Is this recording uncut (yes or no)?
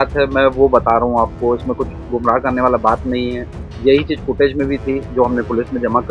yes